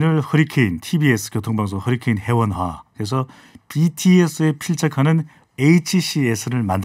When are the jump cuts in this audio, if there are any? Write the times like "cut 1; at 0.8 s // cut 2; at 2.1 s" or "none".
none